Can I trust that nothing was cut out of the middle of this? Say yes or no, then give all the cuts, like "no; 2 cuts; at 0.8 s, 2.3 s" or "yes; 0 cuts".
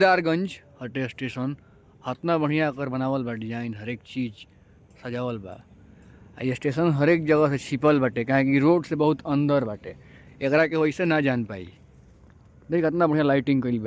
yes; 0 cuts